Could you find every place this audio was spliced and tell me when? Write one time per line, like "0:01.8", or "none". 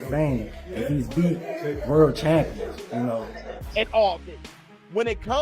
0:03.5

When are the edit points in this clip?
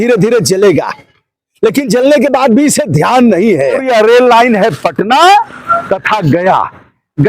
0:03.8

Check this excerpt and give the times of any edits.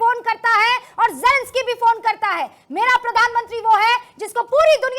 none

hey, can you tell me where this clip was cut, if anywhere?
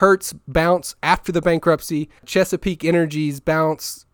0:02.2

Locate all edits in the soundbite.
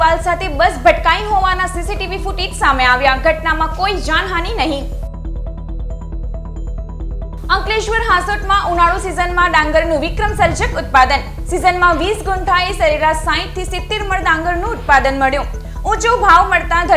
none

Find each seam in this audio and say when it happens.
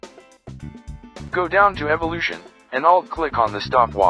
0:01.3

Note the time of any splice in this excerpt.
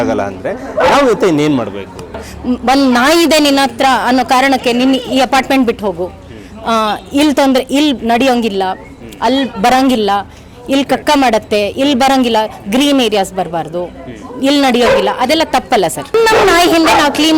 0:02.2
0:16.1

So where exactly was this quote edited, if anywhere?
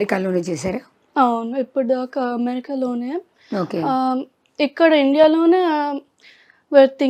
none

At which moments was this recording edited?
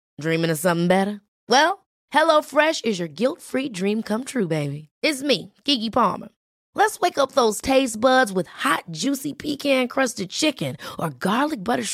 none

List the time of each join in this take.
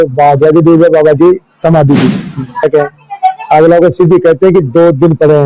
0:02.6

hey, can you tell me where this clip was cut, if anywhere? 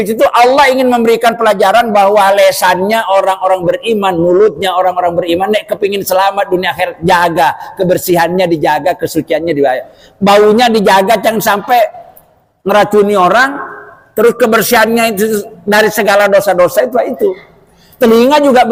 none

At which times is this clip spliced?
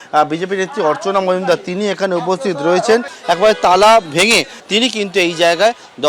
0:03.1
0:04.5

